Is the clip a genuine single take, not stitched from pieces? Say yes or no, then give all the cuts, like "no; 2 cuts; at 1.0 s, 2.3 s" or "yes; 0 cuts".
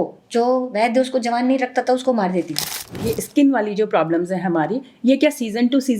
no; 1 cut; at 2.9 s